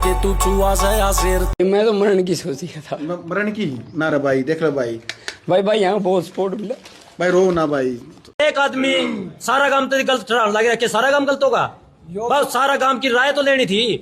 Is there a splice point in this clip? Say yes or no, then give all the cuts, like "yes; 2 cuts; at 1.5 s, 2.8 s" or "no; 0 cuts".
yes; 2 cuts; at 1.5 s, 8.1 s